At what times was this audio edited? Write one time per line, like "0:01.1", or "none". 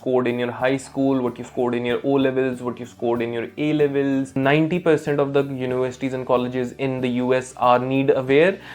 0:04.4